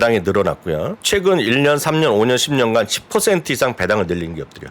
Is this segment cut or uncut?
cut